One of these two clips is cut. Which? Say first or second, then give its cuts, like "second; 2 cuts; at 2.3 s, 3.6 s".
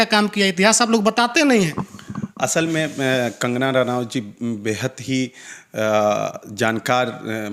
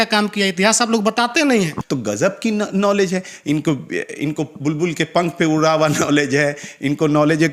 second; 1 cut; at 1.8 s